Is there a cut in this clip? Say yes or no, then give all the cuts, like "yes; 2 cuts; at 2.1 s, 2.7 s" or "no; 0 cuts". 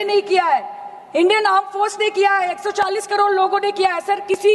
no; 0 cuts